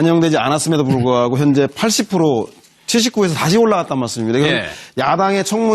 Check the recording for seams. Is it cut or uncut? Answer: cut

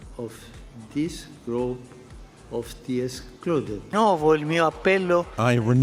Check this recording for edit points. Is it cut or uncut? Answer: cut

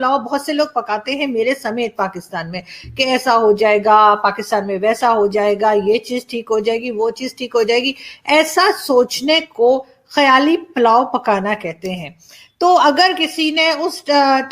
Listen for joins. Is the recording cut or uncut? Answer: uncut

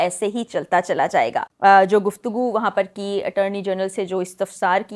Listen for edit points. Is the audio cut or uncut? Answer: cut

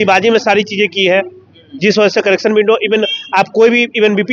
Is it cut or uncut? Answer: uncut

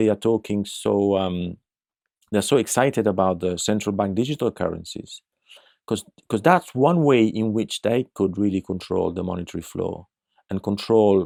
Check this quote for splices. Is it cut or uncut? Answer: uncut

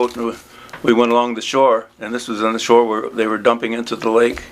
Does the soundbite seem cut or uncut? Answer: cut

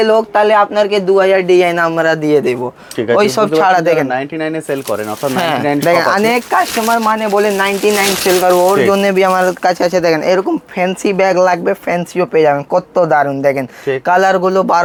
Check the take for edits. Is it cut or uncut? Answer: uncut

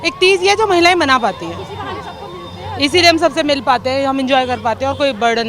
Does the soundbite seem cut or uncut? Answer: uncut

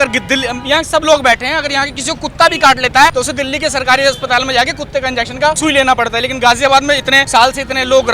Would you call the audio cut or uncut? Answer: cut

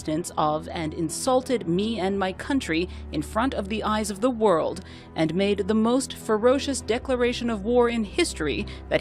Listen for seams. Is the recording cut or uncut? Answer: cut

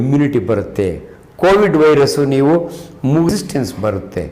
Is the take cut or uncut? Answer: cut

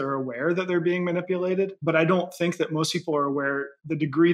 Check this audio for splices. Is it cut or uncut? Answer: cut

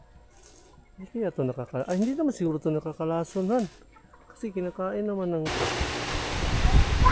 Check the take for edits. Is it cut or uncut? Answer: cut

